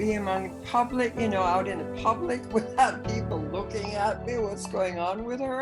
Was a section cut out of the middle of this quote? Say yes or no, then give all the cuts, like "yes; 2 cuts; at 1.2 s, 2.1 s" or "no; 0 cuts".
no; 0 cuts